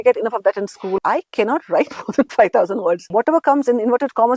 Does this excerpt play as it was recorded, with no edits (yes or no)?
no